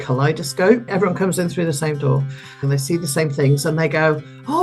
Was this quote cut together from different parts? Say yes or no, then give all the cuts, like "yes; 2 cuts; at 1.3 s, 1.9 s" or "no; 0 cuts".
yes; 2 cuts; at 0.9 s, 2.7 s